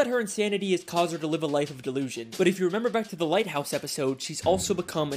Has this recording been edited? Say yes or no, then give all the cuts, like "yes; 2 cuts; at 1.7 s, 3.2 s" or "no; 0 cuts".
no; 0 cuts